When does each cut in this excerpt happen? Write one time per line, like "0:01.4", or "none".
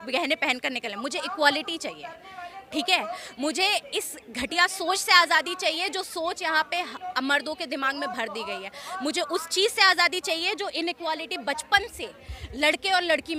none

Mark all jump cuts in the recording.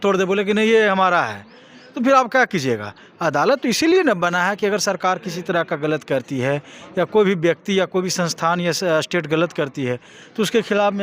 none

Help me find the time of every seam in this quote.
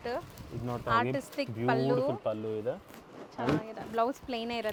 none

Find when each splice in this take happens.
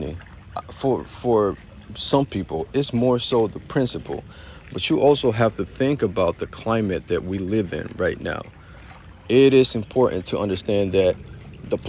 none

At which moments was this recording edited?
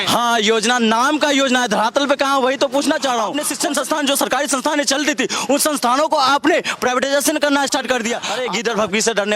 0:03.4
0:08.3

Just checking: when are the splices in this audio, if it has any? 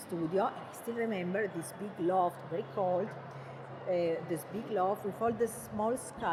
none

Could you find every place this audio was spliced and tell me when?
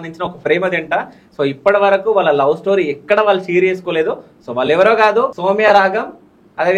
0:05.4

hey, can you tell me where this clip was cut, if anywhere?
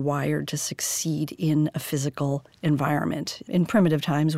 0:03.3

